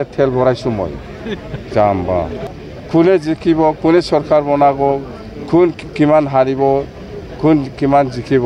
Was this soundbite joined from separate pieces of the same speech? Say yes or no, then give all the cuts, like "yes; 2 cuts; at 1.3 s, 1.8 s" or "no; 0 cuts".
yes; 1 cut; at 2.4 s